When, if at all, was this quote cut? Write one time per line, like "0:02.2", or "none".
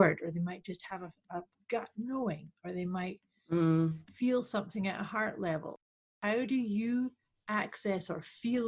0:05.9